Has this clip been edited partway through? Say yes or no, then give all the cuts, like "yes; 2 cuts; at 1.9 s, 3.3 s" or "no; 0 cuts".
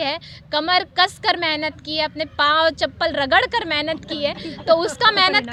no; 0 cuts